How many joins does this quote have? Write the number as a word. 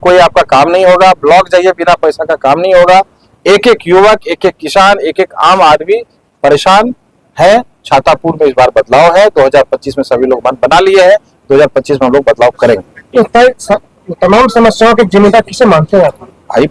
zero